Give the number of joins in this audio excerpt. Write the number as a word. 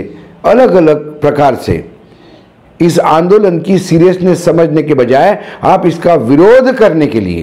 zero